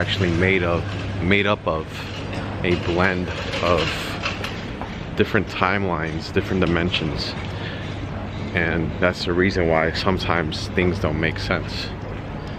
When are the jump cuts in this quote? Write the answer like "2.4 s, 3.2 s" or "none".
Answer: none